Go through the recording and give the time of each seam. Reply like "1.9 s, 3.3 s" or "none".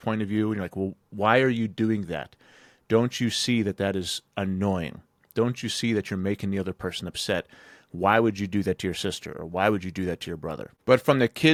none